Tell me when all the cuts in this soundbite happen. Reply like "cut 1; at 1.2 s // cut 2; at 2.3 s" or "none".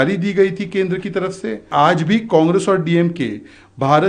cut 1; at 1.6 s